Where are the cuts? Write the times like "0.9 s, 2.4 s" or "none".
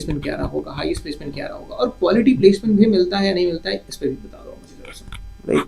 none

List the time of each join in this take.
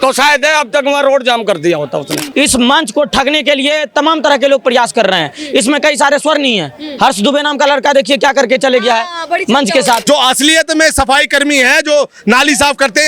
2.2 s, 10.0 s

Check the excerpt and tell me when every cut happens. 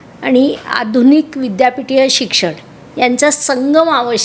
none

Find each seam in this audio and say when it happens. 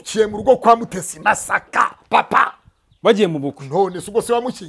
none

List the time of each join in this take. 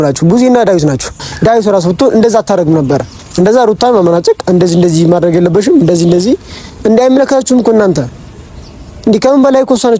1.3 s

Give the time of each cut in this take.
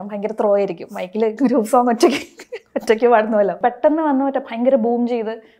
3.6 s

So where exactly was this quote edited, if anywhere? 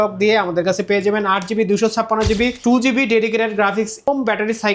2.6 s, 4.1 s

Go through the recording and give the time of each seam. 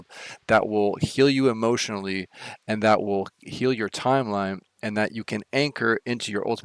none

